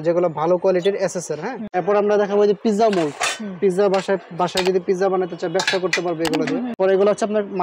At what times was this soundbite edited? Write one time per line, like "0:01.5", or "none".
0:01.6
0:06.8